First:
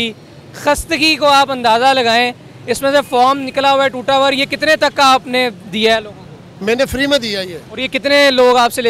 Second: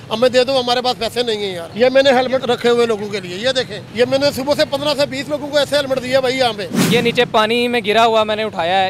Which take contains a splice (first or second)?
second